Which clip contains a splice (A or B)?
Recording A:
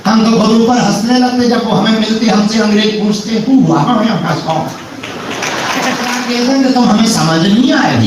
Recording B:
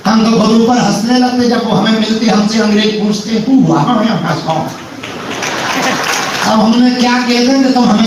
A